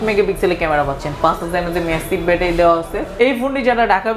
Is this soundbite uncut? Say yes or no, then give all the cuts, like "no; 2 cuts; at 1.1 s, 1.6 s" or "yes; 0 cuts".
no; 1 cut; at 3.0 s